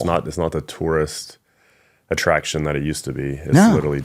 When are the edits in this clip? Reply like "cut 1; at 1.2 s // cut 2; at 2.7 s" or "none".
none